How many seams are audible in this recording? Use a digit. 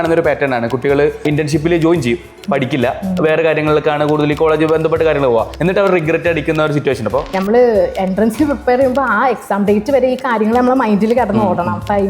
3